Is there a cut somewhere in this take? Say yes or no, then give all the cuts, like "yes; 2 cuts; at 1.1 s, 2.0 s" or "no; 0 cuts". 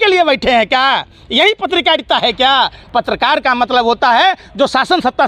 no; 0 cuts